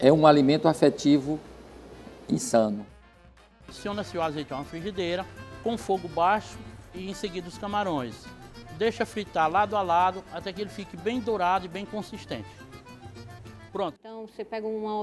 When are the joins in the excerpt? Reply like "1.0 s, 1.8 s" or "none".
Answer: 3.5 s, 14.0 s